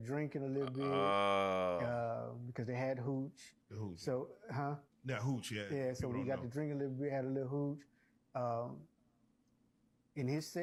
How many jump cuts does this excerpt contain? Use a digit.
0